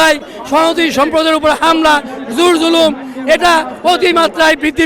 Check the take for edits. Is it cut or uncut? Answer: uncut